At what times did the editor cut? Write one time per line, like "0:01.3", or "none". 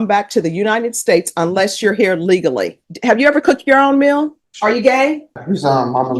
0:02.9
0:04.4
0:05.4